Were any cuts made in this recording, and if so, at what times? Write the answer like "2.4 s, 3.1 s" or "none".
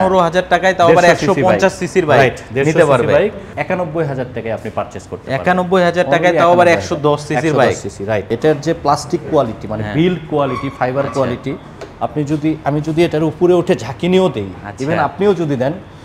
3.5 s, 8.3 s